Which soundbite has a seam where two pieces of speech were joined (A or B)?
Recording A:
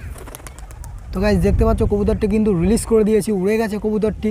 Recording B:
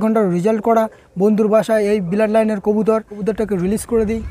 B